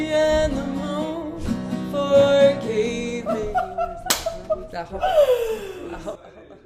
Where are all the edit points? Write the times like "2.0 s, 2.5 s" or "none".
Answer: none